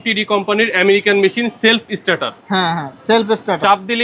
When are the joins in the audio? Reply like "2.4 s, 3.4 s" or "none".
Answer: none